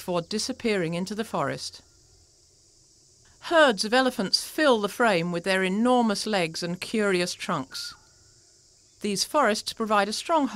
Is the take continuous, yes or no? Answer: no